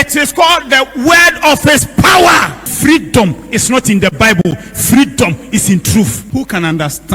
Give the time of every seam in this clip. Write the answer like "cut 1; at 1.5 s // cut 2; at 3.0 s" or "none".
cut 1; at 2.7 s // cut 2; at 6.2 s